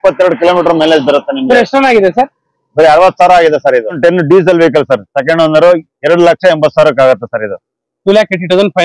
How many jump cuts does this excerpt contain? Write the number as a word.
one